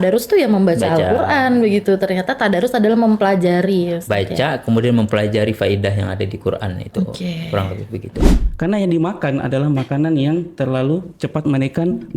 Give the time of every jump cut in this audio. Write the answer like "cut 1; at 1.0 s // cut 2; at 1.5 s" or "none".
cut 1; at 8.4 s